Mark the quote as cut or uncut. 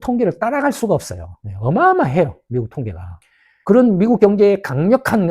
uncut